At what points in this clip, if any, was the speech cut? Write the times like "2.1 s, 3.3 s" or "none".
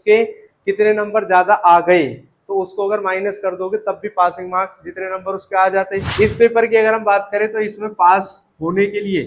6.1 s